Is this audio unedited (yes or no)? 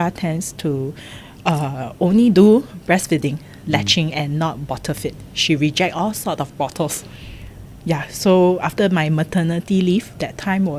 yes